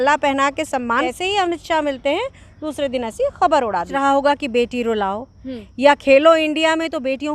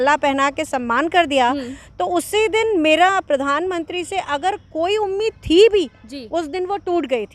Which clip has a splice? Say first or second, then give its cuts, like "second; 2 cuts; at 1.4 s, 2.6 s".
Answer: first; 2 cuts; at 1.1 s, 3.9 s